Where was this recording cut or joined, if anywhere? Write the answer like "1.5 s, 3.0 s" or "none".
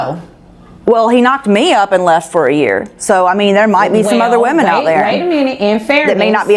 none